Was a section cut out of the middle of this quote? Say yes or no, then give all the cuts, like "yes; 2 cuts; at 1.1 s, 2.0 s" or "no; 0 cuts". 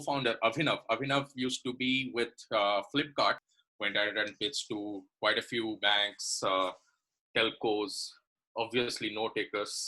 yes; 1 cut; at 3.4 s